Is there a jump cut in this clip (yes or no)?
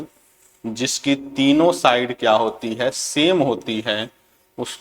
no